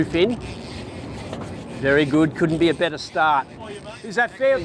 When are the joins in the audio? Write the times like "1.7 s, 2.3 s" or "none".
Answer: 3.5 s